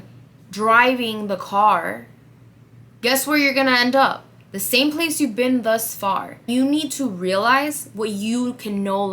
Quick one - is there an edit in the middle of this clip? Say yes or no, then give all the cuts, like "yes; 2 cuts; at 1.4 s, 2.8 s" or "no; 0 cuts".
yes; 1 cut; at 6.5 s